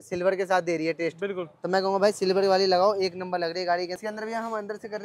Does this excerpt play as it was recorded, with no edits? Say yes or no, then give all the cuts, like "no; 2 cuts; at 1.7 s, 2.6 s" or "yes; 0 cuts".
no; 1 cut; at 4.0 s